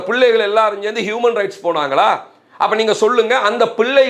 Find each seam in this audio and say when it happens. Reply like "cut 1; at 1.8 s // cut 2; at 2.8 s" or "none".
none